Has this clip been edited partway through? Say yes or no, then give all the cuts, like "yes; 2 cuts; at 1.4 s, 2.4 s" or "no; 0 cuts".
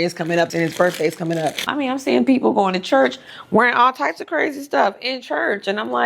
yes; 1 cut; at 1.6 s